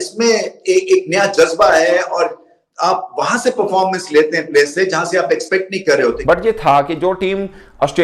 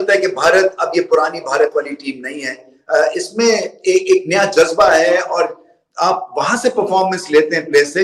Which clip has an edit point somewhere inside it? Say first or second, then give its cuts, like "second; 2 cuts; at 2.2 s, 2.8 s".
first; 1 cut; at 6.2 s